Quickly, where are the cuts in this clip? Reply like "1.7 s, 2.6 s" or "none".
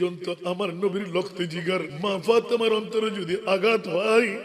1.9 s